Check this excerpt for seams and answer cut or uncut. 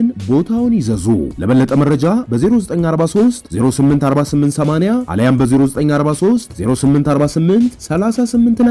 uncut